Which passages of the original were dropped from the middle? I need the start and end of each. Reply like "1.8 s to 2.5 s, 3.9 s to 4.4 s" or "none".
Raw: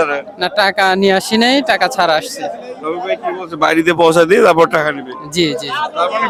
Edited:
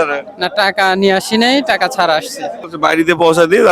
2.7 s to 3.5 s